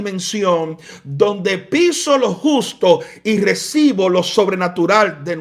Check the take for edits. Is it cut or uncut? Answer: uncut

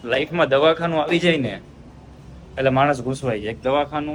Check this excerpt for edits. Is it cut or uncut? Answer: uncut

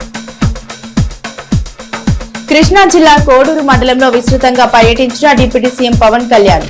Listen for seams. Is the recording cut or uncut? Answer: cut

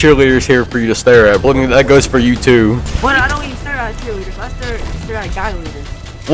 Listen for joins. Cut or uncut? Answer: cut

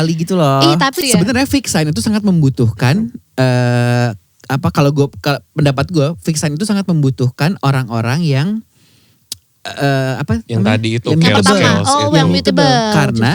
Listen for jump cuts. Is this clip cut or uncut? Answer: cut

